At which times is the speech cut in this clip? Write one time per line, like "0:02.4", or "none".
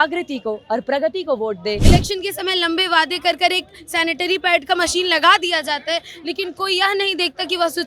0:01.8